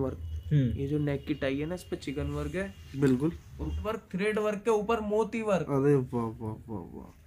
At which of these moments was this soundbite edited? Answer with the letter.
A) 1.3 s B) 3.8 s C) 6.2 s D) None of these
B